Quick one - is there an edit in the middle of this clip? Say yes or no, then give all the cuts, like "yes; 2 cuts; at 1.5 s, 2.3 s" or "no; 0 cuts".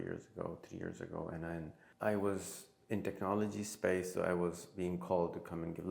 yes; 1 cut; at 1.8 s